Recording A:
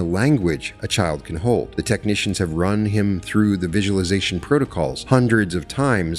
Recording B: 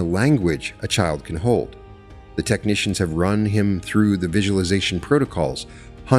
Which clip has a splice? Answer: A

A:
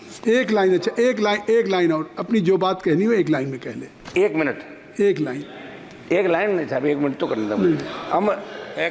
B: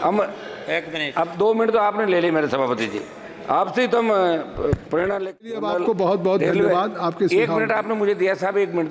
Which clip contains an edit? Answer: B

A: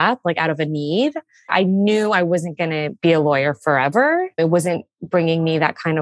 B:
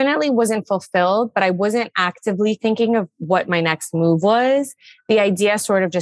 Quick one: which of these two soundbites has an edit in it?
A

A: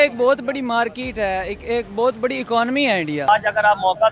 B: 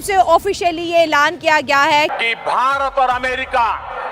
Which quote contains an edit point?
A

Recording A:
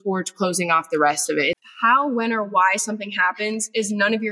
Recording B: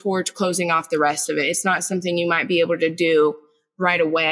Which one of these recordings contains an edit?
A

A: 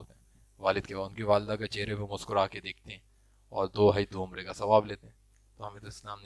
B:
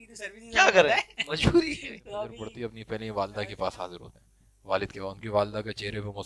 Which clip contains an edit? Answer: B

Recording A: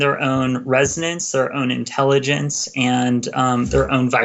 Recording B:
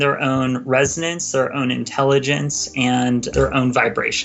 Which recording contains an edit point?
B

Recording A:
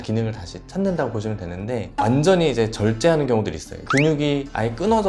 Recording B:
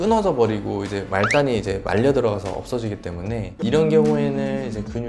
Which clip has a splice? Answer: A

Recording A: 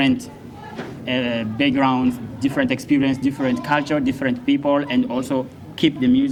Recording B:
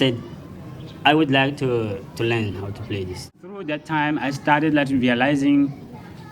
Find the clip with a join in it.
B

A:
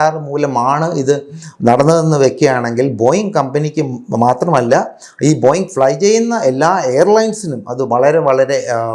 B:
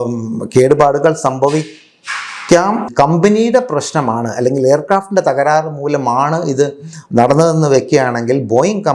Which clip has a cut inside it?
B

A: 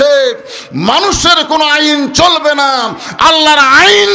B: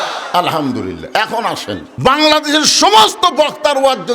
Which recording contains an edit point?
B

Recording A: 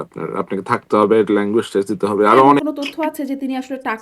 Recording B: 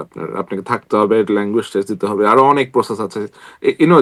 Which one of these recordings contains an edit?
A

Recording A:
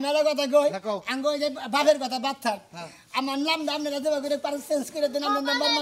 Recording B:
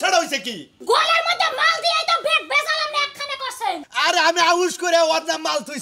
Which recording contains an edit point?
B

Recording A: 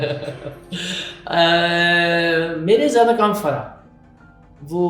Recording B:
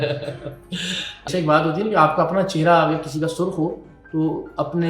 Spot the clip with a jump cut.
B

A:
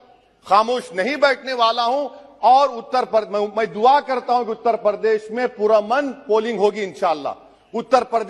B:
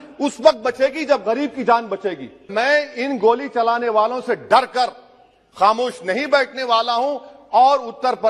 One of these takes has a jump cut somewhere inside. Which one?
B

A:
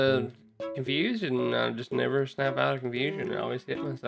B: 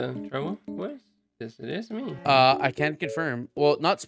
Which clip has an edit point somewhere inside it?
B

